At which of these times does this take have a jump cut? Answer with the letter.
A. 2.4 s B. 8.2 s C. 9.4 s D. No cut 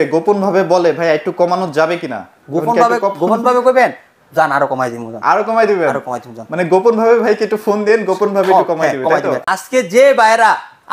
C